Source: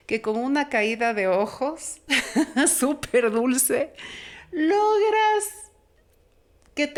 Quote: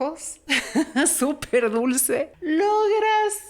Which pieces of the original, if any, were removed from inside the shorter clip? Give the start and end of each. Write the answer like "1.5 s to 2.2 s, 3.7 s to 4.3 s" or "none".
3.9 s to 4.4 s